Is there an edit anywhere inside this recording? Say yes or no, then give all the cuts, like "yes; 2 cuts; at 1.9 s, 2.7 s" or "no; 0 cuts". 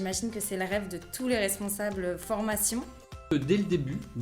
yes; 1 cut; at 3.3 s